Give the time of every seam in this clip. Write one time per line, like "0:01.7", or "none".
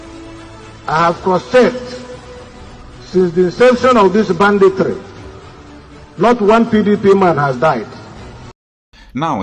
none